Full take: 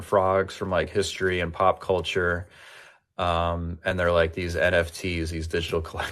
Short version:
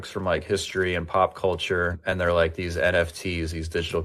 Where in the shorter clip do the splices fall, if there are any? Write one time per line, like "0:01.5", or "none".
0:02.0